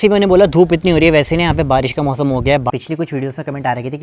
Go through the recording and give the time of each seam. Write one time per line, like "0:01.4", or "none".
0:02.7

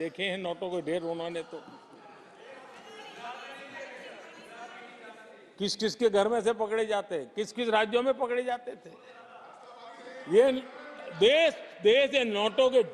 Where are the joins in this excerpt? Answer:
none

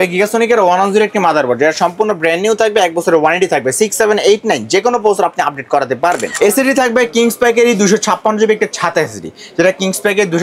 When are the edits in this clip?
0:06.3

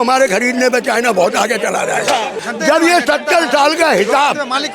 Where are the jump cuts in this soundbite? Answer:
0:02.4

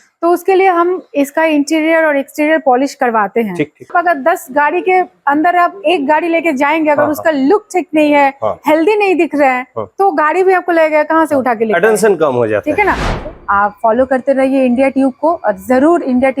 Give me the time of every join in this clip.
0:03.9
0:13.1

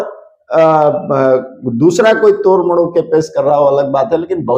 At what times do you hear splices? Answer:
none

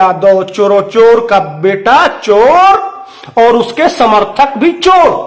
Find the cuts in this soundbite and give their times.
none

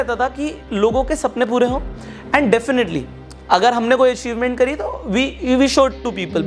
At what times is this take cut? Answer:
none

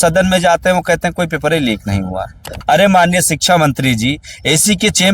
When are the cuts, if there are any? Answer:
0:02.5

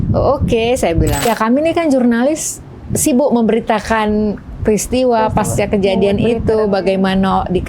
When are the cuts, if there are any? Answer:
0:01.3

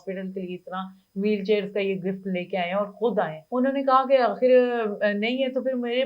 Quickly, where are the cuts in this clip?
0:03.4

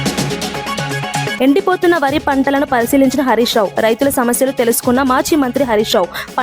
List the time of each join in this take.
0:01.3

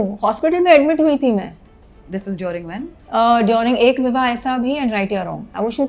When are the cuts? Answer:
none

